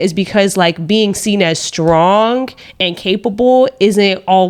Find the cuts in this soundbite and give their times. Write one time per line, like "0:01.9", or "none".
none